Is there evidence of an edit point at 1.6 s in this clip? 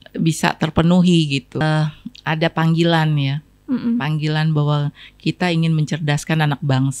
yes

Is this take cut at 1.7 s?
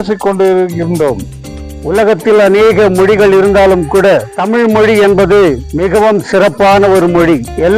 yes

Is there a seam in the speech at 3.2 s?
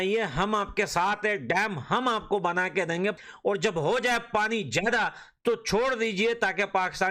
yes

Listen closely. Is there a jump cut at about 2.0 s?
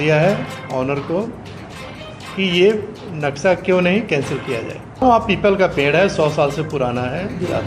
no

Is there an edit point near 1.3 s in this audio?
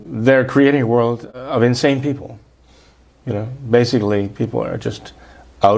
yes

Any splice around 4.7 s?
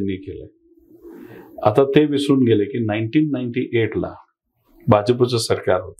no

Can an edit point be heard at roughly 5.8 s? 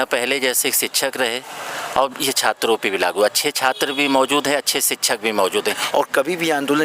yes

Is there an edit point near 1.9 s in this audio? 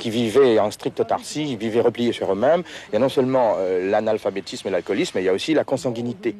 no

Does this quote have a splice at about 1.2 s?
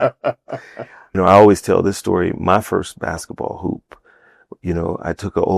yes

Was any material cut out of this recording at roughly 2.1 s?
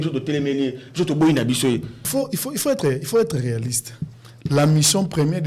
yes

